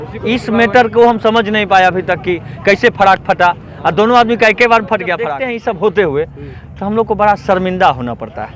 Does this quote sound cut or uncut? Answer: cut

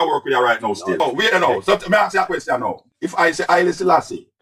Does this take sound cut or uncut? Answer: cut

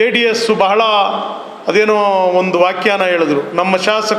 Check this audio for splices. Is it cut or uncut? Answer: uncut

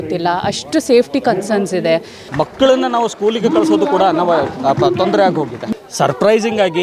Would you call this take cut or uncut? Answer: cut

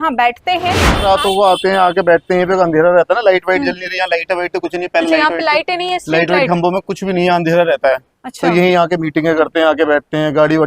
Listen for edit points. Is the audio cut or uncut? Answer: cut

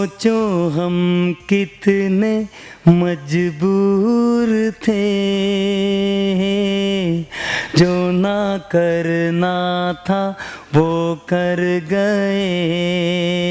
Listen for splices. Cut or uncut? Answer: uncut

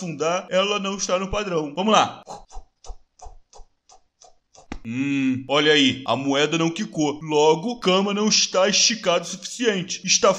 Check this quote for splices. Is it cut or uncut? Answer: uncut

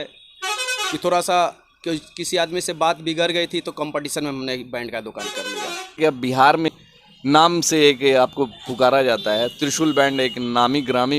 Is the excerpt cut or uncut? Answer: cut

